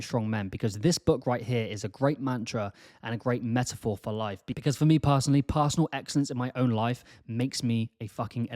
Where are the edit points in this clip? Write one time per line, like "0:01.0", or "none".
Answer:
0:04.6